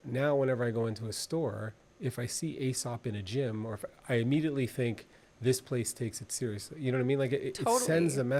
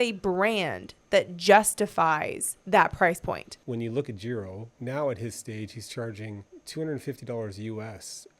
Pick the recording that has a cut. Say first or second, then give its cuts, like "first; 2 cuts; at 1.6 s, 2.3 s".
second; 3 cuts; at 3.5 s, 4.7 s, 6.5 s